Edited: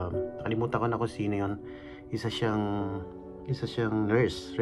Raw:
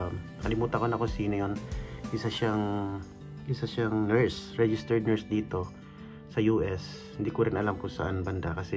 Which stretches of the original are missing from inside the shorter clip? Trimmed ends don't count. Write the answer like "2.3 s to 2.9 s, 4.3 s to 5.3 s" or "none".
none